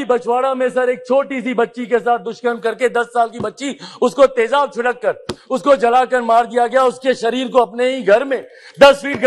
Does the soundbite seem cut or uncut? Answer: uncut